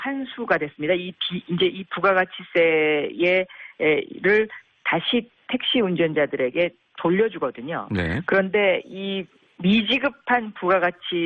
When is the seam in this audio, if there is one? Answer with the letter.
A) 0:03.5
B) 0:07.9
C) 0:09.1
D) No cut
A